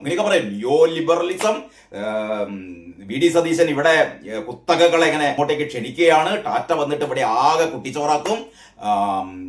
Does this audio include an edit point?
yes; 1 cut; at 5.3 s

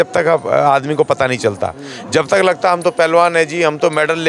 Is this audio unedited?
yes; 0 cuts

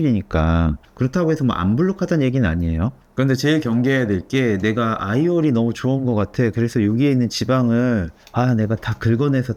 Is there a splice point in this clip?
no; 0 cuts

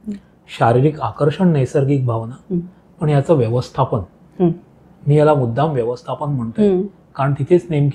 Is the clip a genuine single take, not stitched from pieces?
yes; 0 cuts

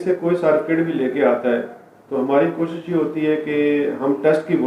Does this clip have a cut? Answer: no; 0 cuts

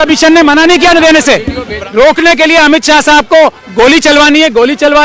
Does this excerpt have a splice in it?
yes; 1 cut; at 1.7 s

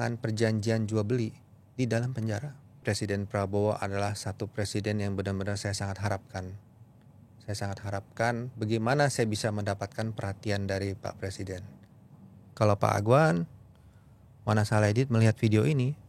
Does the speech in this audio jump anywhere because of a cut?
yes; 2 cuts; at 2.8 s, 12.6 s

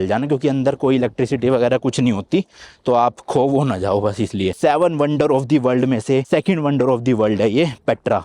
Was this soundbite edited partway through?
yes; 2 cuts; at 4.6 s, 6.2 s

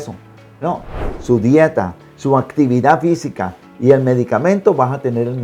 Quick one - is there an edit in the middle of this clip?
yes; 1 cut; at 1.1 s

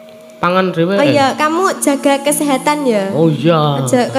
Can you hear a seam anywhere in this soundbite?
no; 0 cuts

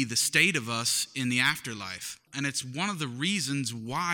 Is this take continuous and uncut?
no; 1 cut; at 2.3 s

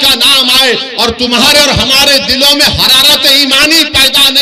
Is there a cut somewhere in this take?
no; 0 cuts

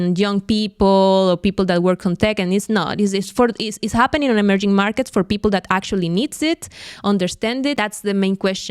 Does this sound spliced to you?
yes; 1 cut; at 7.8 s

